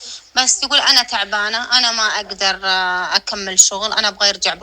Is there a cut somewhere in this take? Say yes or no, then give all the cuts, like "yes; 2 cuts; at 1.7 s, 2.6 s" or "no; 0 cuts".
no; 0 cuts